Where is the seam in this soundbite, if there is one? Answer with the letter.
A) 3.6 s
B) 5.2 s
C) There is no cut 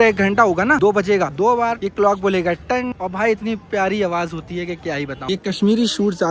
B